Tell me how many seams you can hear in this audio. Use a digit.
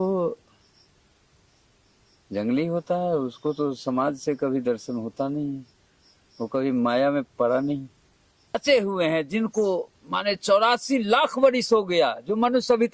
1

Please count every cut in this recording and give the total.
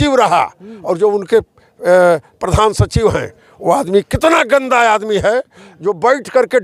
0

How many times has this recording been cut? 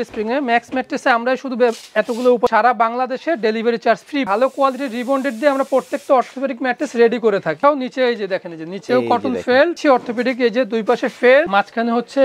5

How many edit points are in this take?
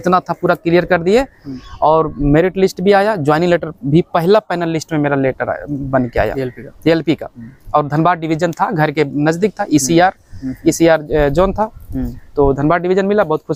0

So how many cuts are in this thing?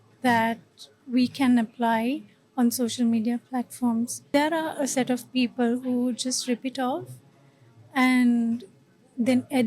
1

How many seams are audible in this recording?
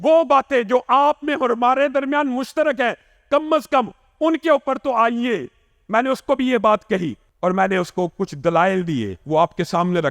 1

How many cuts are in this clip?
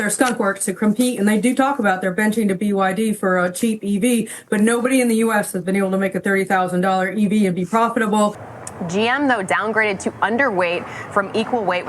1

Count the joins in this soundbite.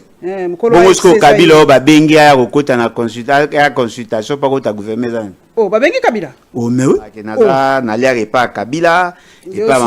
1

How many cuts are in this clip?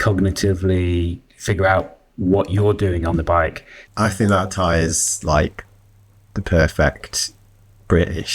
1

